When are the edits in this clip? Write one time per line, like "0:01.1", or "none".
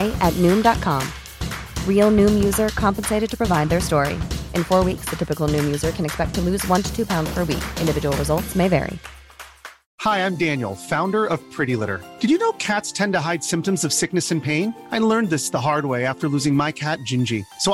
0:09.6